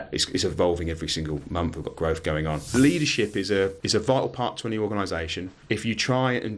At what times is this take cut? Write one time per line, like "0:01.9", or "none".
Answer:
0:02.7
0:03.8
0:05.5